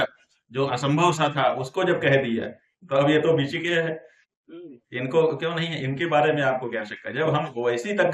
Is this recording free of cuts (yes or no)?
yes